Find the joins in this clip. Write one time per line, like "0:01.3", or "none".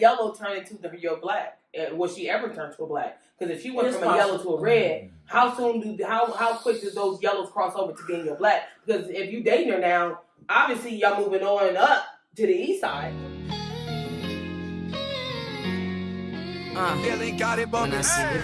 0:13.0